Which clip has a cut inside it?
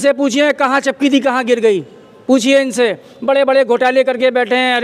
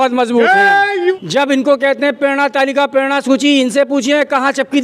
second; 1 cut; at 1.1 s

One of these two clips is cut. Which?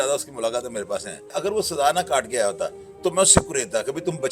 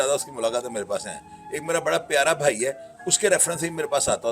first; 1 cut; at 1.3 s

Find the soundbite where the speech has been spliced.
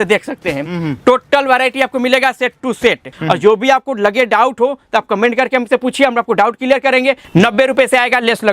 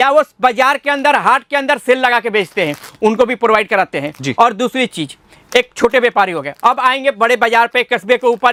first; 2 cuts; at 3.1 s, 7.2 s

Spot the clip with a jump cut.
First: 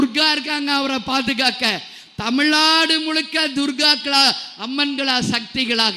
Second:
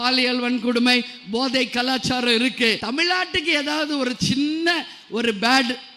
second; 1 cut; at 2.8 s

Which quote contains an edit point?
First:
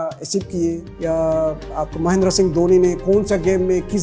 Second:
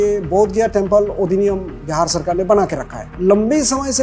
second; 1 cut; at 3.0 s

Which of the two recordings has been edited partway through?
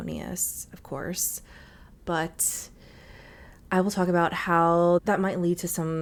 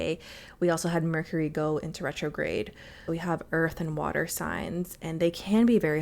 second; 1 cut; at 3.0 s

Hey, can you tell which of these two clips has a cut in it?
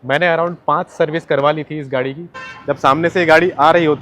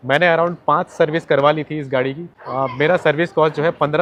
first; 1 cut; at 2.5 s

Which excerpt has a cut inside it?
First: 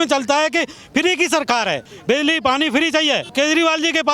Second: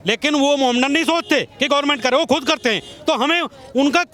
first; 2 cuts; at 1.9 s, 3.3 s

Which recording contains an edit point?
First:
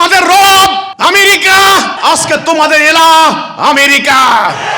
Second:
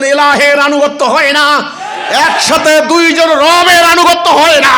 first; 2 cuts; at 0.9 s, 1.9 s

